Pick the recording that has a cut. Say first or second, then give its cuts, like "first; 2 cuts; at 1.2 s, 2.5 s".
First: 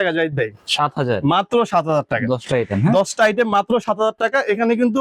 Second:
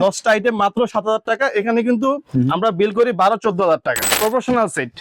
second; 1 cut; at 4.0 s